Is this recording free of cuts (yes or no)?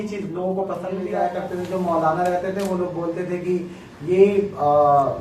no